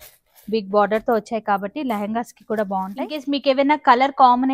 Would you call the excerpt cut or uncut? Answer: cut